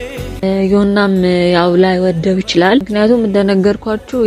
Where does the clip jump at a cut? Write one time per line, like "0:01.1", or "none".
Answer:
none